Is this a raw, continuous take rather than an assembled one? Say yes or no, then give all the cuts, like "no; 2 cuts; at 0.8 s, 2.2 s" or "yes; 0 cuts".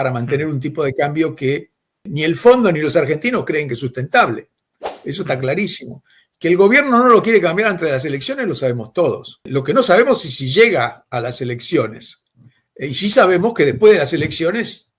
no; 2 cuts; at 2.1 s, 9.5 s